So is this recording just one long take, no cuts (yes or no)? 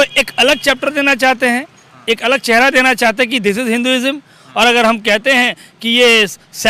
yes